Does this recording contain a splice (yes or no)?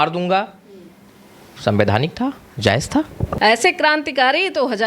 yes